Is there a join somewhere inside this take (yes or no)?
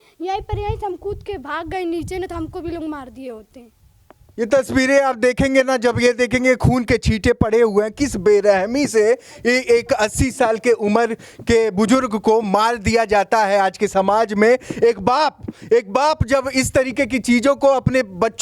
no